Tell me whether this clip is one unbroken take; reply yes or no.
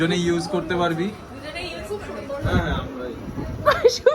no